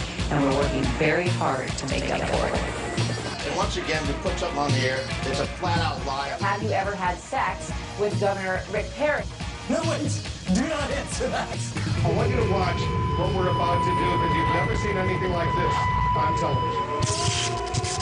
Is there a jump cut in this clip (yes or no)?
no